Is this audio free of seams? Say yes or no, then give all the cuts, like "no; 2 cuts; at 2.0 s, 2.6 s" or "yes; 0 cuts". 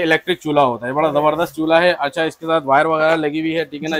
yes; 0 cuts